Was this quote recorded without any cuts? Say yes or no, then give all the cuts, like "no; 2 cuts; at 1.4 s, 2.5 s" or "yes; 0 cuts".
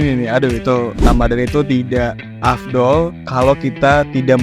no; 1 cut; at 1.0 s